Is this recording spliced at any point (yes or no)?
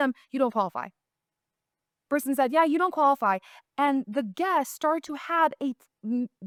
no